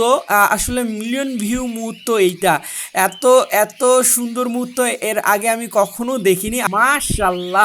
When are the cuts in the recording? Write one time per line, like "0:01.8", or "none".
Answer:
0:06.6